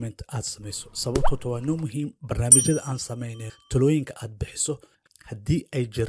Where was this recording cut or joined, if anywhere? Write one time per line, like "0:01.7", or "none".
none